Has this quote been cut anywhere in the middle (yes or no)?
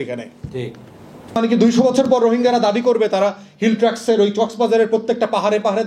yes